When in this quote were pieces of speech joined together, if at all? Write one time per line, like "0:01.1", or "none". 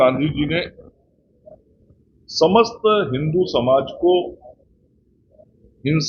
none

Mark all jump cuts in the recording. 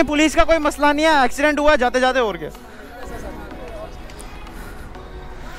none

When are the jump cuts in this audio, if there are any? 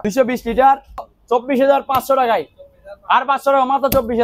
0:01.1

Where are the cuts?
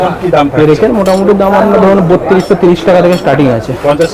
none

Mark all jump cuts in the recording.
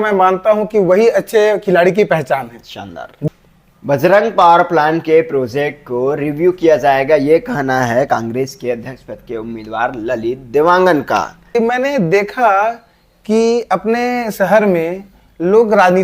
0:03.3
0:11.5

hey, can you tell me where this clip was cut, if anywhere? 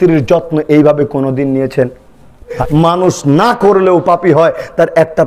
0:02.5

